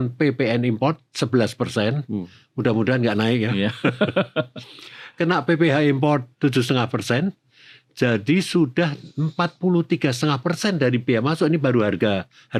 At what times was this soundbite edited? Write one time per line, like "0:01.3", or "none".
none

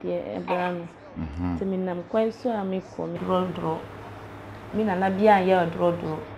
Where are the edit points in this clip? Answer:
0:03.2

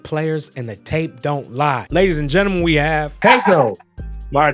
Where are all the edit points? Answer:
0:01.8
0:03.2

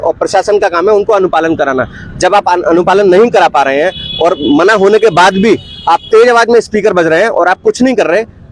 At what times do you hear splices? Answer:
none

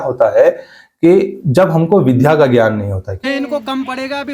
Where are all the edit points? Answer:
0:03.2

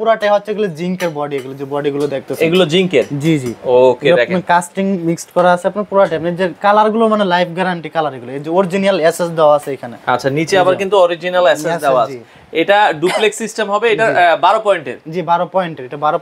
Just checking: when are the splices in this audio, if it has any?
none

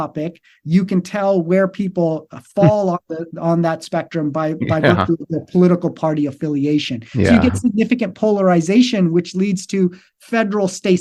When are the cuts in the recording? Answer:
none

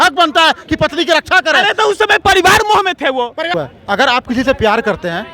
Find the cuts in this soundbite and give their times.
0:03.5

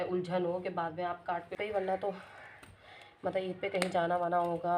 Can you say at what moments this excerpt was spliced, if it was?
0:01.5

